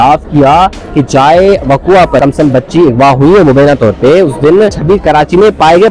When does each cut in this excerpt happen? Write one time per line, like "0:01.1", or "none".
0:02.2
0:04.8